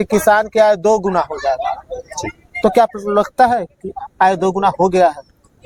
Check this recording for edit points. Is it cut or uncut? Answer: uncut